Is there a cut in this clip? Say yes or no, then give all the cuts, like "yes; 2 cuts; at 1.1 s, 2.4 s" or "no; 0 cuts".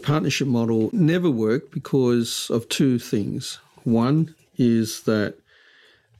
yes; 1 cut; at 0.9 s